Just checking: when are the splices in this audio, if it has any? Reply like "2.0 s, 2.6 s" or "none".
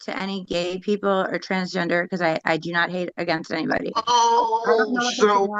none